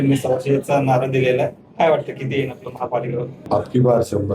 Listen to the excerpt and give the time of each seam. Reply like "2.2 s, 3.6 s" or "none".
3.4 s